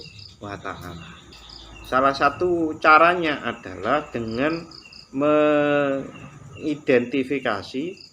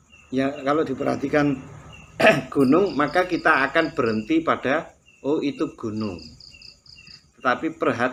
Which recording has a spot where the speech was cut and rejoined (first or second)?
first